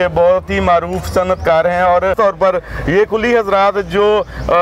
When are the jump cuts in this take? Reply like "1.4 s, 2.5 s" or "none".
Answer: 2.1 s